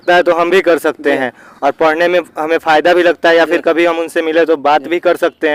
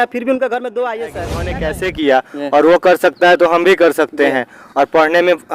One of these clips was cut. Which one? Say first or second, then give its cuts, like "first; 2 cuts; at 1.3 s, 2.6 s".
second; 1 cut; at 1.3 s